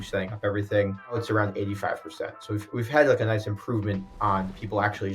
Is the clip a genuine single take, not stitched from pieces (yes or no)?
no